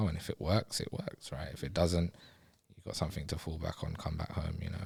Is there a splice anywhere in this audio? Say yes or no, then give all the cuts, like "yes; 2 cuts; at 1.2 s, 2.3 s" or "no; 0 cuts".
no; 0 cuts